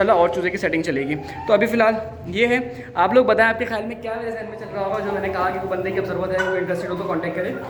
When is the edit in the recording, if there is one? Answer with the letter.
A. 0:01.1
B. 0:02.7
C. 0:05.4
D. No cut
D